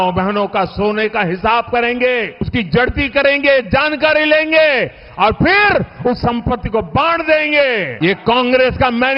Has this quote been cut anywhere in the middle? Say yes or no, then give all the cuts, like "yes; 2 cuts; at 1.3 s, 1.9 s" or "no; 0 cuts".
yes; 2 cuts; at 2.5 s, 7.9 s